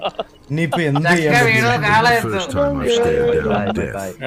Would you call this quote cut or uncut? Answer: uncut